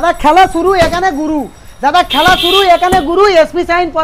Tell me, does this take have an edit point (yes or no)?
no